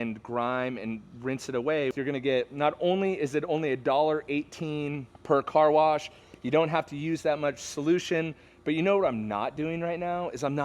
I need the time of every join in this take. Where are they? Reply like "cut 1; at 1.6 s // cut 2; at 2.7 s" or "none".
cut 1; at 1.9 s // cut 2; at 5.1 s